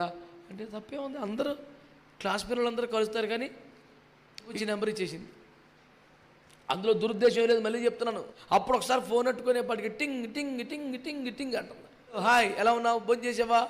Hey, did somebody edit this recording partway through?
yes; 3 cuts; at 4.5 s, 8.3 s, 12.2 s

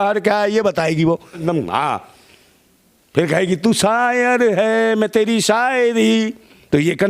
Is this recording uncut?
no; 1 cut; at 1.4 s

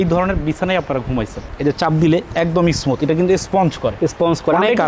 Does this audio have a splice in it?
yes; 1 cut; at 1.5 s

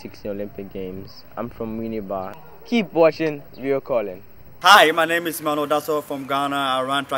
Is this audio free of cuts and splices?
yes; 0 cuts

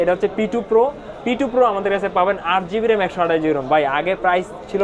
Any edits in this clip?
no; 0 cuts

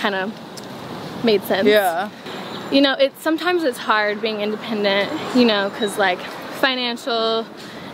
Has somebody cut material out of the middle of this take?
yes; 1 cut; at 2.1 s

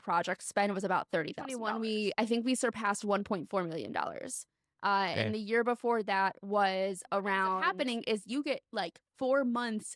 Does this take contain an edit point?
yes; 2 cuts; at 1.7 s, 7.6 s

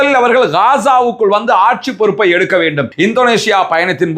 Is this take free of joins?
no; 1 cut; at 2.9 s

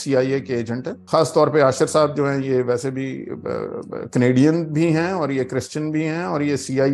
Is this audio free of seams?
no; 1 cut; at 0.9 s

